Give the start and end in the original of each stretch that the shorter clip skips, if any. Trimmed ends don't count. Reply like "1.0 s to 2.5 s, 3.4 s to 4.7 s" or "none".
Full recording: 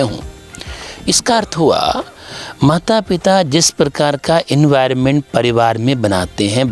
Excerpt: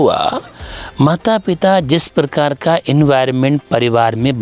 none